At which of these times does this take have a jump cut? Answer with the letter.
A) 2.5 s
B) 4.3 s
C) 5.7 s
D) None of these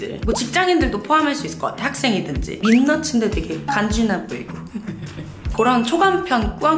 A